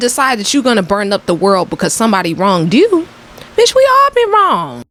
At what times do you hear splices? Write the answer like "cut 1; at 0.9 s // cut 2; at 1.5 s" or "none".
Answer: none